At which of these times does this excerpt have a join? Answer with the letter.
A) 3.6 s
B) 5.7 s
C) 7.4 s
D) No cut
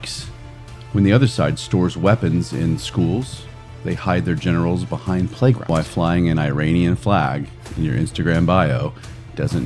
B